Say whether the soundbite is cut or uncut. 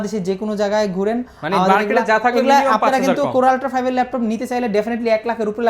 uncut